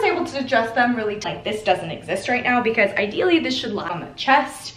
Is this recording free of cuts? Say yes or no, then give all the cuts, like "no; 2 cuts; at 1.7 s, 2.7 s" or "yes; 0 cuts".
no; 2 cuts; at 1.3 s, 3.9 s